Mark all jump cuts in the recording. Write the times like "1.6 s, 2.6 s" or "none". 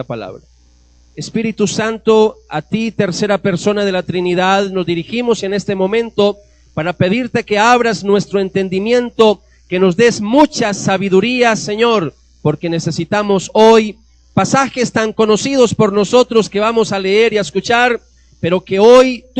14.9 s